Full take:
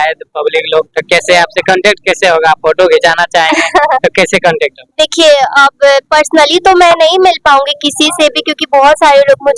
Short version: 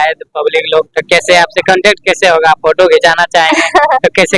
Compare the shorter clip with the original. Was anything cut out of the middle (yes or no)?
no